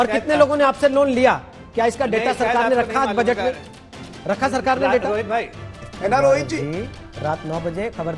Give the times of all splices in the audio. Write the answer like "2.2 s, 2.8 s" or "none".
5.9 s